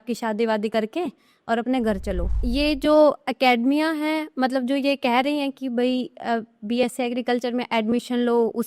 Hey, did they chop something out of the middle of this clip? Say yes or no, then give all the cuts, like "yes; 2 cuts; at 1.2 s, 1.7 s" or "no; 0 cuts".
yes; 1 cut; at 2.3 s